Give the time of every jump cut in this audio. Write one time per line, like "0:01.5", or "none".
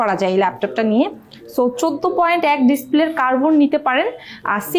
none